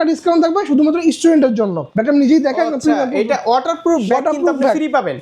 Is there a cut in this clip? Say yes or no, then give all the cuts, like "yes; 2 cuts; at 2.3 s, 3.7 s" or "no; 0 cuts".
yes; 1 cut; at 1.8 s